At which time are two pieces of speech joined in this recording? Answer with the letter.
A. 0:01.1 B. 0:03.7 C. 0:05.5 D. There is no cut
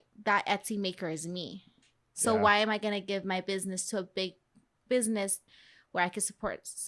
C